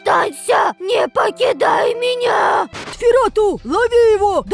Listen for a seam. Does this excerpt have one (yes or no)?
yes